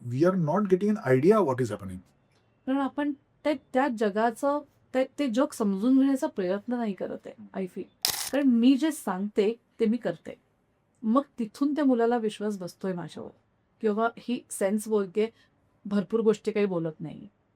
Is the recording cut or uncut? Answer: cut